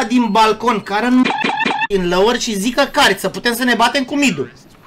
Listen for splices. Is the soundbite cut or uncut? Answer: uncut